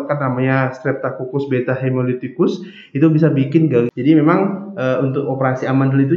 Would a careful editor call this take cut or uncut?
cut